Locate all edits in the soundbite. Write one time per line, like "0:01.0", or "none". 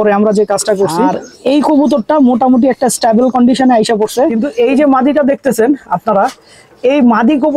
0:01.2
0:04.4

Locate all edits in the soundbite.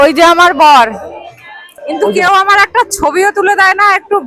0:01.7

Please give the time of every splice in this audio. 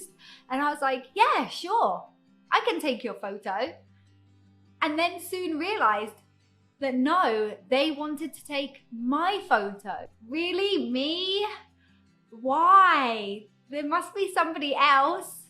0:10.2

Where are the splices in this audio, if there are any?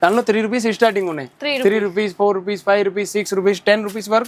none

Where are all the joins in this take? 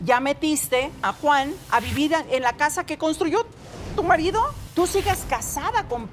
0:01.1
0:04.6

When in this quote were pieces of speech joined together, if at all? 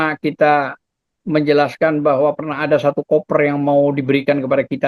none

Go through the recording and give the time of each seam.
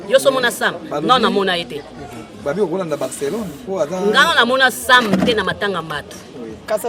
none

